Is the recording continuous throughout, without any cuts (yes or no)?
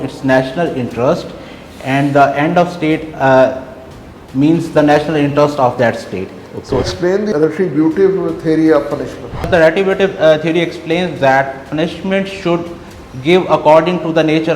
no